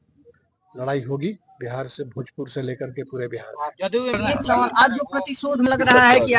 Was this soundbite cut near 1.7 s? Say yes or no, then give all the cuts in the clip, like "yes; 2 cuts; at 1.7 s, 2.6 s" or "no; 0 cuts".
no; 2 cuts; at 4.2 s, 5.6 s